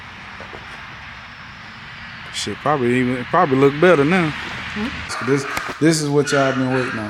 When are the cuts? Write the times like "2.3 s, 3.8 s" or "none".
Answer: 5.1 s